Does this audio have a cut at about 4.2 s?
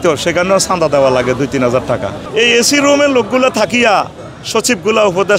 no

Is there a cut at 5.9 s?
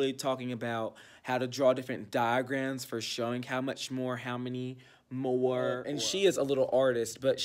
yes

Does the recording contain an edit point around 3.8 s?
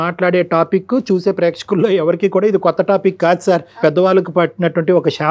yes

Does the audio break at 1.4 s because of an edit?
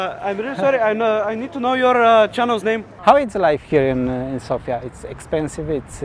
no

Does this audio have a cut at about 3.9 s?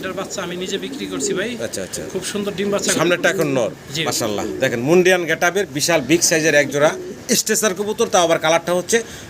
yes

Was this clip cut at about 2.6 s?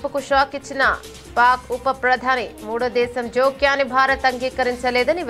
no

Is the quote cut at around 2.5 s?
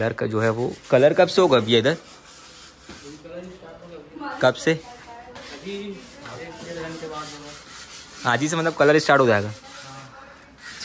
no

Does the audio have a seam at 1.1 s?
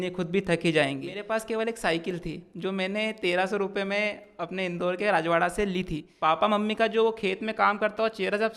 yes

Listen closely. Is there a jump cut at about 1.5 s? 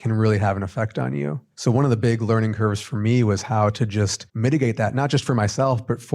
yes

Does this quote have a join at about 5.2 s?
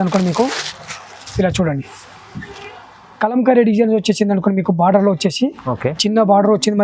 no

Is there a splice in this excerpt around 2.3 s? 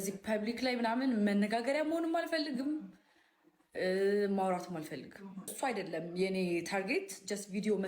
no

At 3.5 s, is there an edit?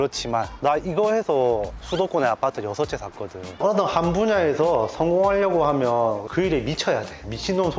yes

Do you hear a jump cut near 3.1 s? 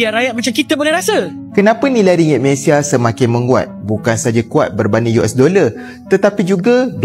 no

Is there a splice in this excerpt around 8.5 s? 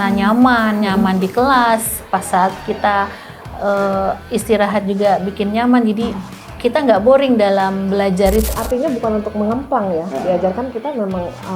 yes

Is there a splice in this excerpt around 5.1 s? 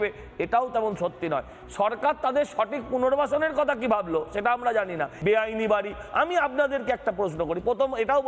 yes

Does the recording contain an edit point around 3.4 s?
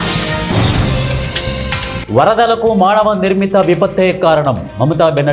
no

